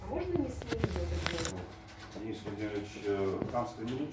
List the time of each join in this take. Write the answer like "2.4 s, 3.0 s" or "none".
1.5 s